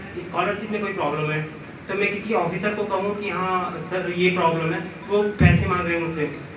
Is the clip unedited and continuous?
yes; 0 cuts

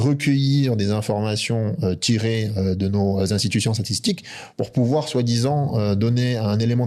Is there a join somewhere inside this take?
no; 0 cuts

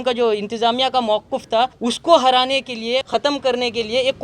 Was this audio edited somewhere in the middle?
yes; 2 cuts; at 1.8 s, 3.1 s

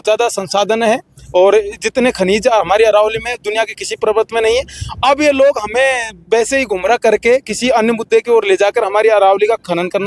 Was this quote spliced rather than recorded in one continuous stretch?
no; 0 cuts

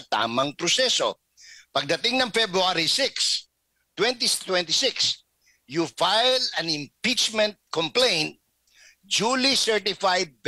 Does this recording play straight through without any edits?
yes; 0 cuts

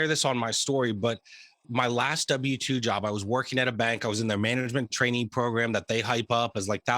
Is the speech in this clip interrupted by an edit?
yes; 1 cut; at 1.7 s

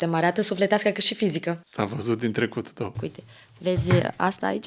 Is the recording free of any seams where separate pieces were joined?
no; 2 cuts; at 1.7 s, 3.0 s

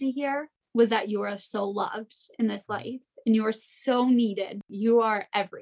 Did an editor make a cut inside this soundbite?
yes; 1 cut; at 4.6 s

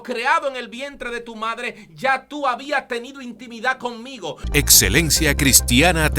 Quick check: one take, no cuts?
no; 1 cut; at 4.4 s

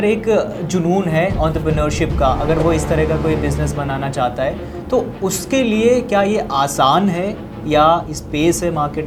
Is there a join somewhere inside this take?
no; 0 cuts

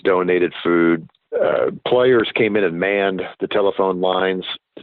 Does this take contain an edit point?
yes; 1 cut; at 1.2 s

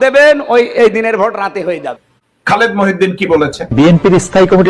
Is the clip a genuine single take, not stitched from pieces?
yes; 0 cuts

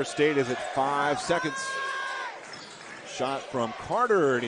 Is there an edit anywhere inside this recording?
no; 0 cuts

